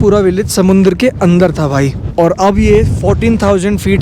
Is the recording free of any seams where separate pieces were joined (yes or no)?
yes